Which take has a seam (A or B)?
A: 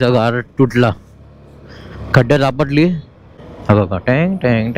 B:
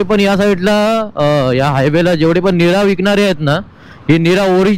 A